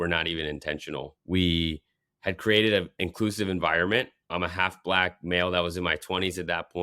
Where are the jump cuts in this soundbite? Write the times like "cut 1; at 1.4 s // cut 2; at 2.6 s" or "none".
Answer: cut 1; at 4.3 s

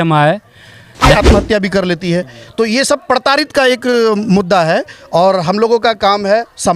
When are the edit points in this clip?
cut 1; at 1.0 s

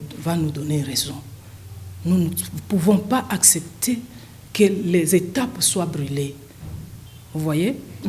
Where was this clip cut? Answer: none

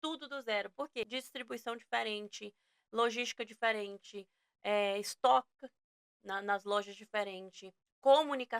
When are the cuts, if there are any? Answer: cut 1; at 1.1 s

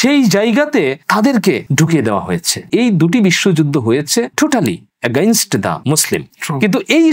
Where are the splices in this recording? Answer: cut 1; at 1.0 s // cut 2; at 1.7 s // cut 3; at 2.7 s // cut 4; at 4.3 s

